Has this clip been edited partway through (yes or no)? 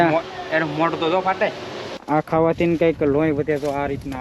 yes